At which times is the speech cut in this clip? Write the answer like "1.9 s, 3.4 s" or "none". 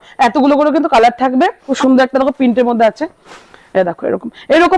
1.7 s